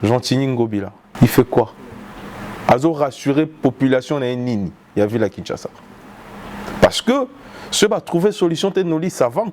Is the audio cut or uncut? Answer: cut